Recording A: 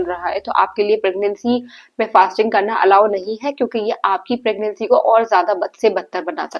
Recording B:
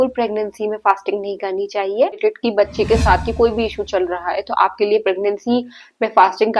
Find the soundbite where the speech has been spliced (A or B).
B